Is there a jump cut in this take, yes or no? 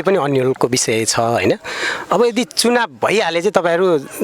no